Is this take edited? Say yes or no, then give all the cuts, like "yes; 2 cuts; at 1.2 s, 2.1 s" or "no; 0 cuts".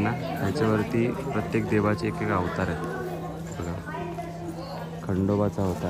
no; 0 cuts